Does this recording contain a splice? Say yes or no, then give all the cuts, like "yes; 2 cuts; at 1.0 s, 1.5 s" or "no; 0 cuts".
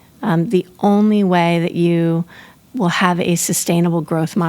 yes; 1 cut; at 2.5 s